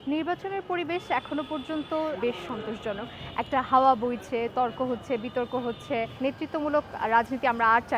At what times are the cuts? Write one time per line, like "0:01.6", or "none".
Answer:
0:02.2
0:06.1